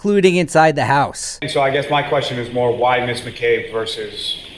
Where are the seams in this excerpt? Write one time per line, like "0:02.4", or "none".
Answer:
none

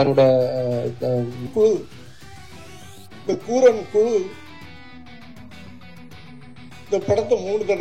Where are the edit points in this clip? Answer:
0:01.5

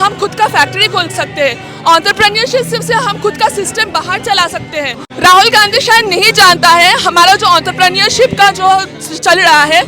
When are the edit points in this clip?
0:05.0

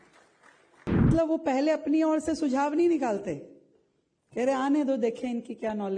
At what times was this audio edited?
0:01.1

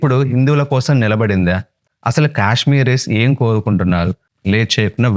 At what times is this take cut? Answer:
0:04.3

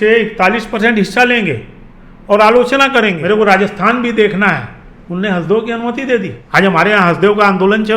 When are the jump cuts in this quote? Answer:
0:03.2
0:06.4

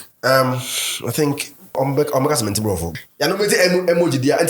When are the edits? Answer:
0:01.8
0:02.9

